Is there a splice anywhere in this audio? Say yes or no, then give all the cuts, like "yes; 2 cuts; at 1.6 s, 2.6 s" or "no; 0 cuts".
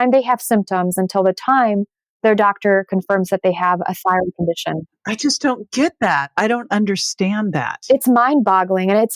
no; 0 cuts